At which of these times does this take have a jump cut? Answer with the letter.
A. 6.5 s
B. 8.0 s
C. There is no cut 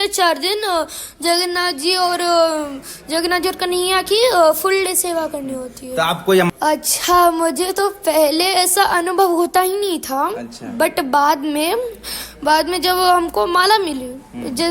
A